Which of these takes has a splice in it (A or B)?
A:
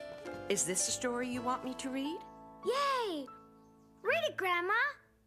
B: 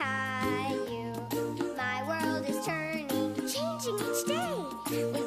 A